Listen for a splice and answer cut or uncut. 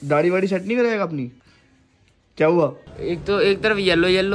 cut